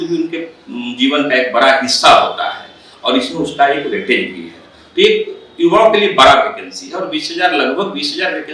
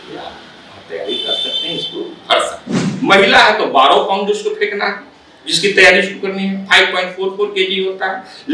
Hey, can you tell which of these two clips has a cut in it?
second; 1 cut; at 2.9 s

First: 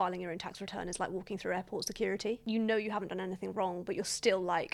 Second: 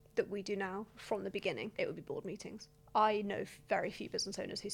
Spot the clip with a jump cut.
second; 2 cuts; at 1.7 s, 2.7 s

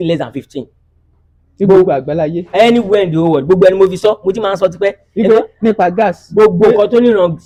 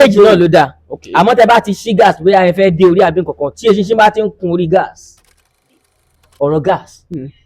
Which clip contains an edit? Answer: second; 1 cut; at 5.7 s

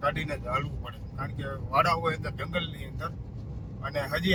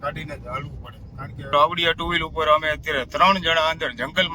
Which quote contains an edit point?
second; 1 cut; at 1.4 s

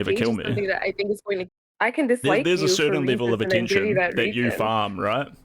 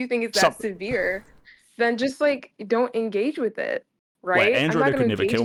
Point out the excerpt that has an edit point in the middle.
first; 1 cut; at 1.5 s

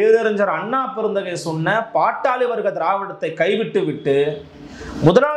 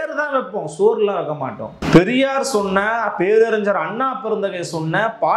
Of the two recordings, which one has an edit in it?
second; 1 cut; at 1.7 s

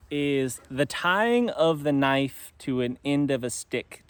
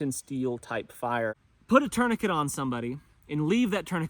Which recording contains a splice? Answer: second; 1 cut; at 1.5 s

